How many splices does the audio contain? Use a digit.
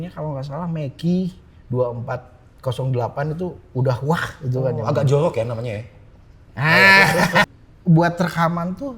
1